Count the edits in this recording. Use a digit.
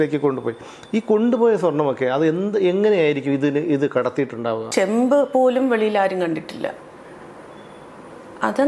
1